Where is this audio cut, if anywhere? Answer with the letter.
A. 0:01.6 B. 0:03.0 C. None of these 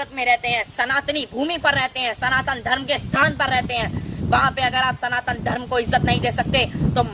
C